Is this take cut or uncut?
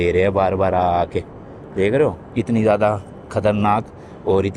uncut